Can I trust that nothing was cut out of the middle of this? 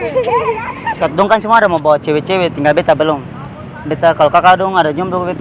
no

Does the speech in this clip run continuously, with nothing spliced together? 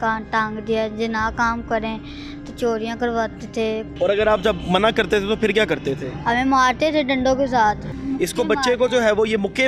no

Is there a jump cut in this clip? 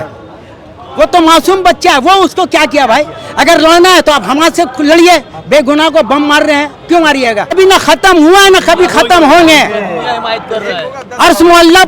yes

